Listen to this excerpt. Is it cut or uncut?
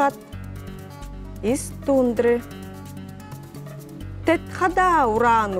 cut